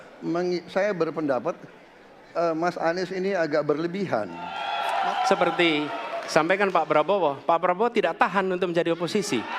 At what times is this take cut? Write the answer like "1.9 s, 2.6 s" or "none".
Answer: 4.6 s